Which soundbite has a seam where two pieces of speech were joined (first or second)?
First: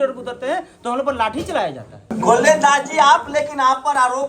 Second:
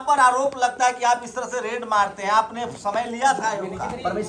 first